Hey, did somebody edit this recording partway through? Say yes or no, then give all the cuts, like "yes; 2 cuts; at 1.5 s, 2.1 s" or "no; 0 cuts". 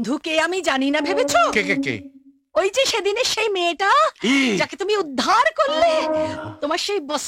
no; 0 cuts